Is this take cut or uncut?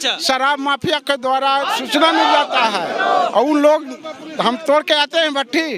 uncut